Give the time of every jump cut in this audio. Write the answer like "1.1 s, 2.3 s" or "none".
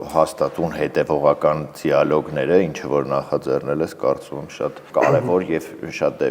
4.8 s